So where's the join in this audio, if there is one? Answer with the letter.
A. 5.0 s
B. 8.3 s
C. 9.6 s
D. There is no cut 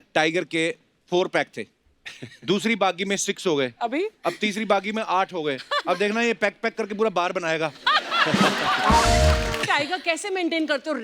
C